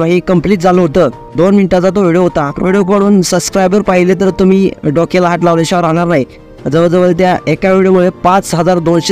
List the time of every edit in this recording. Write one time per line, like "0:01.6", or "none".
0:01.3